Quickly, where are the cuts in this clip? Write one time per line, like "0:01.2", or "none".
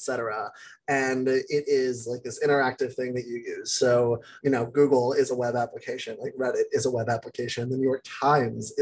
0:04.3